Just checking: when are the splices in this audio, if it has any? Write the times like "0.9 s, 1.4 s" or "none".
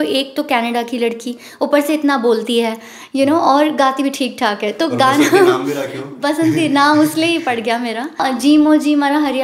8.2 s